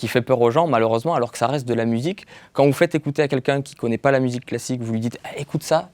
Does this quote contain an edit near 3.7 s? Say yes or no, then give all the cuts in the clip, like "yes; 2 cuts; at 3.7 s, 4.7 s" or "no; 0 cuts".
no; 1 cut; at 2.4 s